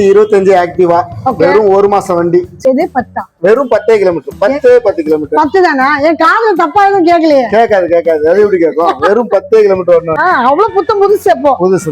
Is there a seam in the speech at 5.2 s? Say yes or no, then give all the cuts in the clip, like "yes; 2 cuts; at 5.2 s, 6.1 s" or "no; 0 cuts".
no; 2 cuts; at 2.6 s, 10.1 s